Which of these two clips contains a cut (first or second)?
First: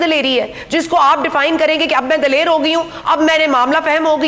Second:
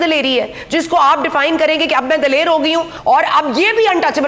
second